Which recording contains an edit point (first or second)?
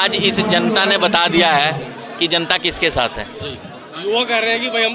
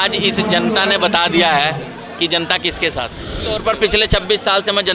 second